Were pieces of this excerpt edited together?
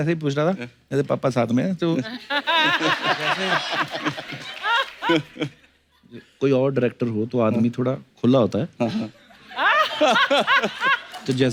no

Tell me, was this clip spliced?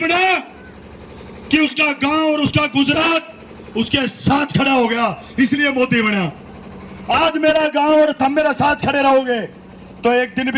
no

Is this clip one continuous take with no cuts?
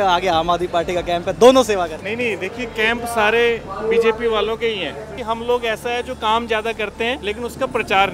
no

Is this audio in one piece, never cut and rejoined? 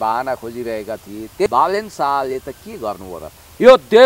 no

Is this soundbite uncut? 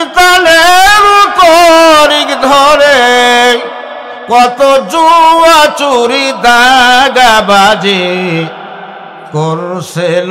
yes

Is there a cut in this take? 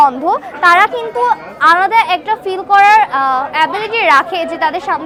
no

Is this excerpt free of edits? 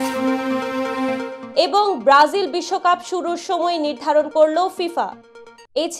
yes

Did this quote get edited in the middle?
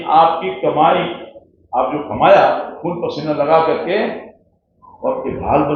no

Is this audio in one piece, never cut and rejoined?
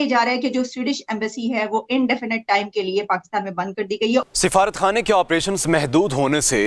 no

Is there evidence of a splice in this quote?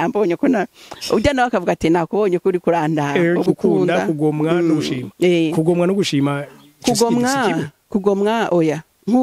yes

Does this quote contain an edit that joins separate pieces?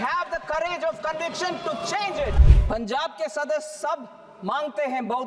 yes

